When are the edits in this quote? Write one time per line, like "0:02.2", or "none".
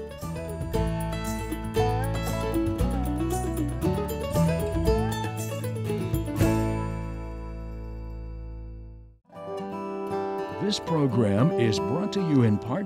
0:09.4
0:10.6